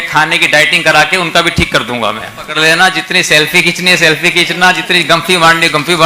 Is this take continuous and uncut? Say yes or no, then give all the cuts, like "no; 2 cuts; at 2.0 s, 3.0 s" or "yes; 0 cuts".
no; 1 cut; at 2.5 s